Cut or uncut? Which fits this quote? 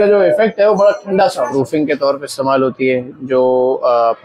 cut